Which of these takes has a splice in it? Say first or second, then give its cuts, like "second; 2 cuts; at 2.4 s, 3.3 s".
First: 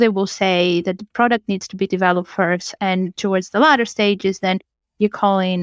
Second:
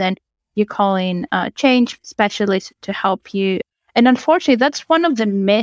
second; 1 cut; at 3.6 s